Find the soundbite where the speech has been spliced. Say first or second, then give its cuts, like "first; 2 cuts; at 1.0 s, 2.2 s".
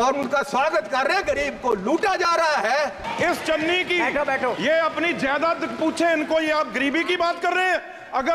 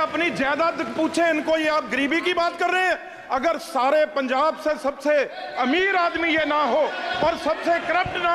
first; 1 cut; at 3.0 s